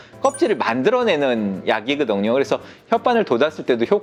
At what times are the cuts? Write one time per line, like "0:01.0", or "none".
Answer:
none

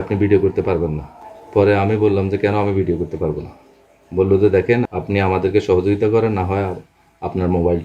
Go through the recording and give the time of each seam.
0:04.9

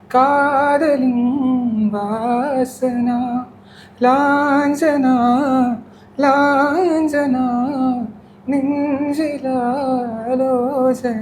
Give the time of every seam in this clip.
none

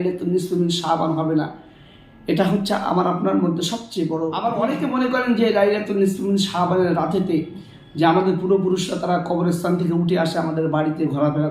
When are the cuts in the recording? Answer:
0:04.4

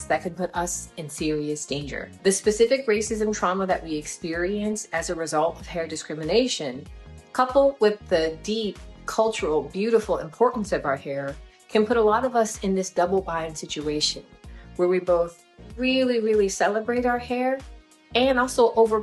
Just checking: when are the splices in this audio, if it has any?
0:02.1

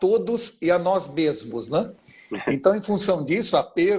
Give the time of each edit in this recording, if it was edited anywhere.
none

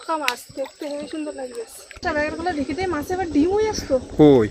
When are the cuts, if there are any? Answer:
0:02.0

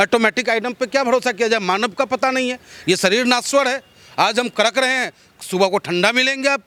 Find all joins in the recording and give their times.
none

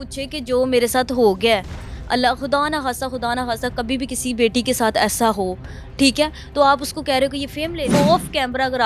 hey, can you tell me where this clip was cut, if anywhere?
0:07.9

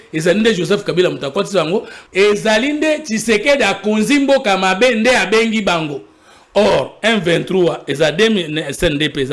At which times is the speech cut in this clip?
0:02.0

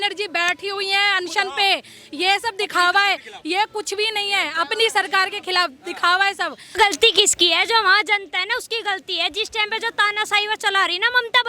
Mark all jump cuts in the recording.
0:06.7

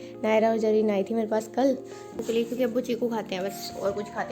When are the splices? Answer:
0:02.1

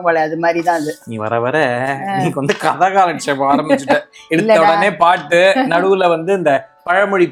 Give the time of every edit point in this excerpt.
none

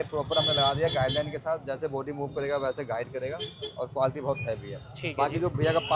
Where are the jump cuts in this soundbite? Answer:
none

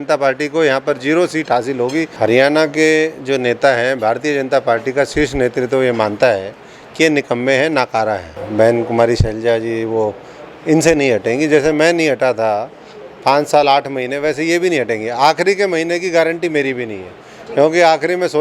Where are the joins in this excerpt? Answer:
0:02.1
0:08.4

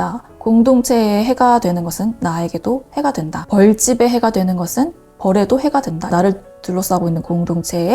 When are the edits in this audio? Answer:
0:06.0

